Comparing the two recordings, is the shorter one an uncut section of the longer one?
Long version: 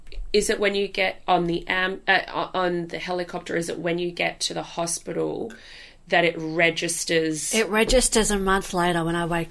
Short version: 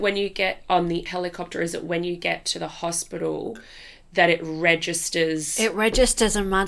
no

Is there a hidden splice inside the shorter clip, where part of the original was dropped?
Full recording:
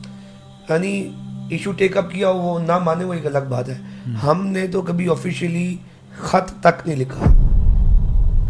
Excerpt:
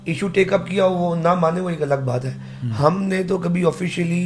no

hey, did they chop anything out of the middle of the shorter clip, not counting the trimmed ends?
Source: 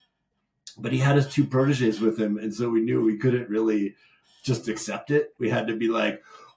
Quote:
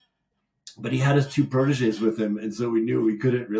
no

